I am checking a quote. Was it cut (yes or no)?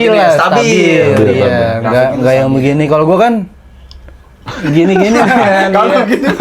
no